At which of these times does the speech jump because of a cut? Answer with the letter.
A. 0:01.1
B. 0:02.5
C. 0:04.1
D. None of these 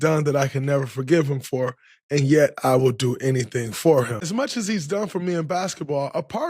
C